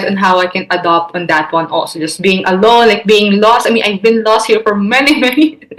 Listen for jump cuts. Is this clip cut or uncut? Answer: uncut